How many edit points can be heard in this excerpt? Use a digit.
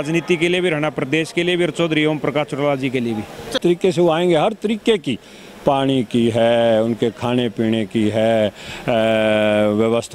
1